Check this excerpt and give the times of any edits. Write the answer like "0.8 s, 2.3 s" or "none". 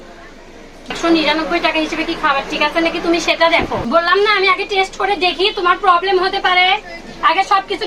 0.9 s, 3.8 s